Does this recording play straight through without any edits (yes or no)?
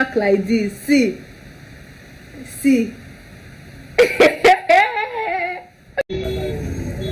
yes